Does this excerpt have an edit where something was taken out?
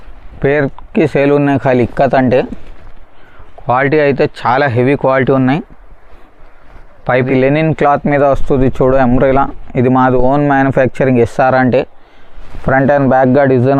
yes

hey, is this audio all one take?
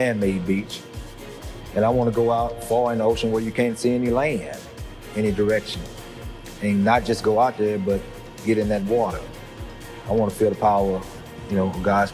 yes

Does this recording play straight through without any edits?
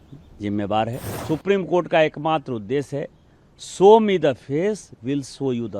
no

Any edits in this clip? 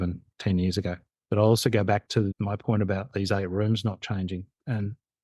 yes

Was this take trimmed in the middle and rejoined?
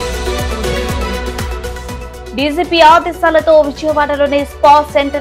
yes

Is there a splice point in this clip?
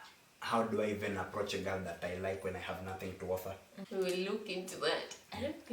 yes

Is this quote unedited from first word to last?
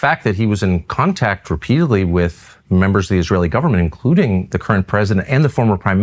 yes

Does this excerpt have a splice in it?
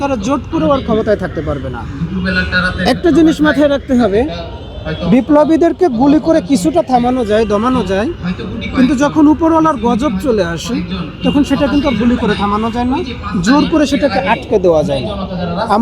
no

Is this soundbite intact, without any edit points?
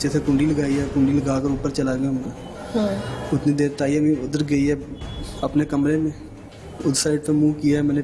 yes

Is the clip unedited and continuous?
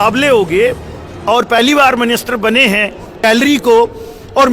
no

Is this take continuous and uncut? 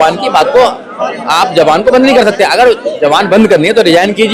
yes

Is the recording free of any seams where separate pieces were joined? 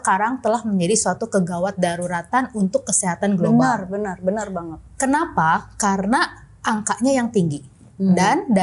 yes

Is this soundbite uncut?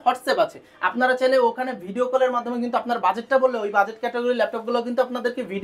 yes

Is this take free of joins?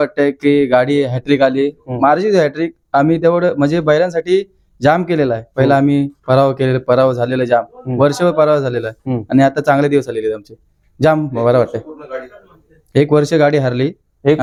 yes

